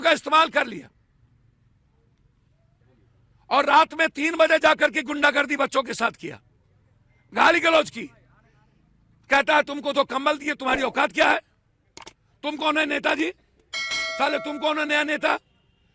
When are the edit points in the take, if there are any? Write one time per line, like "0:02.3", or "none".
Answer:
none

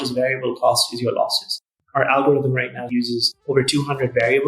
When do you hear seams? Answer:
0:01.7
0:03.3

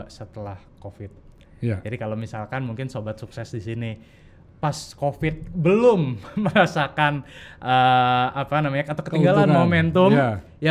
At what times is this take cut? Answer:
none

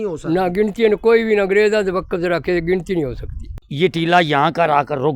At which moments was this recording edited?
0:03.7

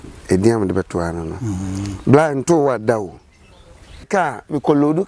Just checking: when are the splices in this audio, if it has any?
0:04.1

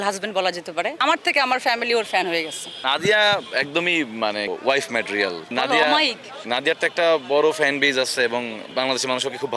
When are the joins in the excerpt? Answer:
0:01.0
0:02.8
0:06.4
0:08.6

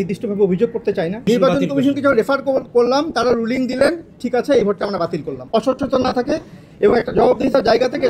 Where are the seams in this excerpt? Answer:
0:01.2
0:05.3

